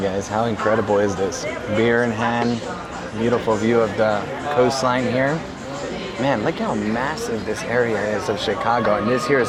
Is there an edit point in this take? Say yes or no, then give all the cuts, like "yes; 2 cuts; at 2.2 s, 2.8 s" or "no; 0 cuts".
no; 0 cuts